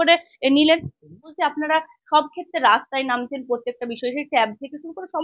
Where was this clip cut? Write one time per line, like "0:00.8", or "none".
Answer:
0:01.3